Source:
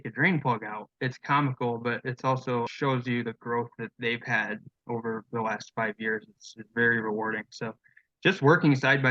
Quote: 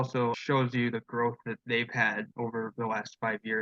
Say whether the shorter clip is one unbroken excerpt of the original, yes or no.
no